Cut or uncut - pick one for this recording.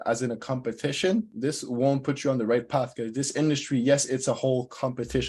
cut